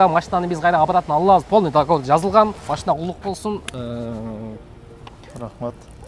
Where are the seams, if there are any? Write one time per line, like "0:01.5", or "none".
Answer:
0:02.7